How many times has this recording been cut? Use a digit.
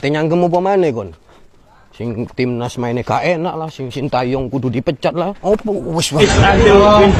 1